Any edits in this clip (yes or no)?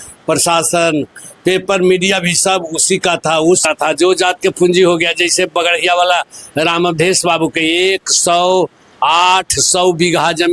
yes